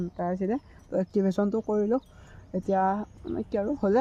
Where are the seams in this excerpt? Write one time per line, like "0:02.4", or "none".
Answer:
none